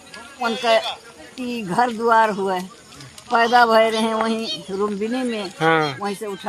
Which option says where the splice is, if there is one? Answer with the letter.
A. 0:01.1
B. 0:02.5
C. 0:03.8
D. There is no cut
D